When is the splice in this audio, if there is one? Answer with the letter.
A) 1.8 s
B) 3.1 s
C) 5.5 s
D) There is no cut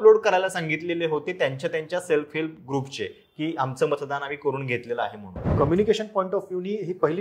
C